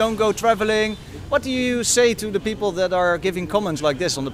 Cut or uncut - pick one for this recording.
uncut